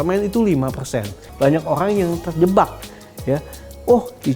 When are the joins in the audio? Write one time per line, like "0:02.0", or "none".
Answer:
0:01.2